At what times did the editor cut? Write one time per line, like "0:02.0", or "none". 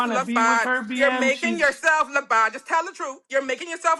none